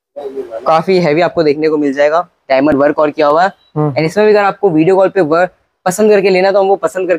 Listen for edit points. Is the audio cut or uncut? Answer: uncut